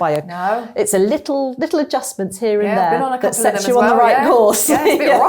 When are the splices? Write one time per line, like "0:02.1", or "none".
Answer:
none